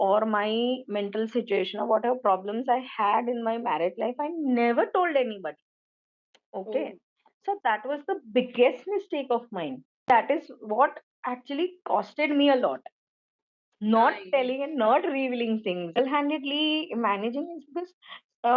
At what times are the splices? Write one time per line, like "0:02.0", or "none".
0:10.1
0:16.0